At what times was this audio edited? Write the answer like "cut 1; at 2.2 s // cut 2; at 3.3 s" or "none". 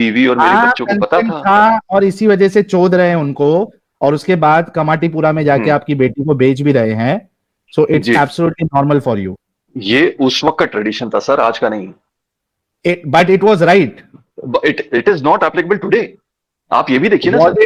none